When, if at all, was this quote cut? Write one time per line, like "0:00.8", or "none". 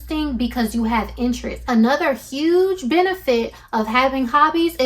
0:01.5